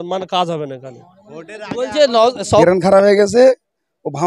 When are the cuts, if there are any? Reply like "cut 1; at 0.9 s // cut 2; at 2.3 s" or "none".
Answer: cut 1; at 2.6 s